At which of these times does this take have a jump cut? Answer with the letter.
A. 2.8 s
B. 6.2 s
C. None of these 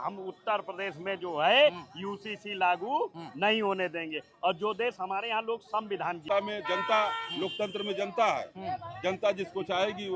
B